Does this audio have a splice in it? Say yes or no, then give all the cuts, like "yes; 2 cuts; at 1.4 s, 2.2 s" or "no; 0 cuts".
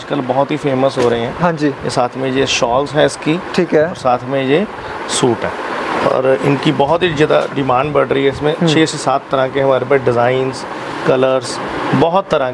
no; 0 cuts